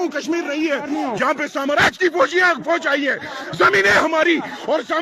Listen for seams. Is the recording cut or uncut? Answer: uncut